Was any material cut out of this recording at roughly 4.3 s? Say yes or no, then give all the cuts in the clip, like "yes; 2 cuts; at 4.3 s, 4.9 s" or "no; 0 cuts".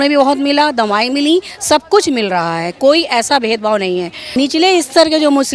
yes; 1 cut; at 4.3 s